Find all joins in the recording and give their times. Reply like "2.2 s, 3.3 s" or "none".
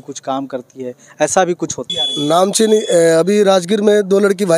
1.9 s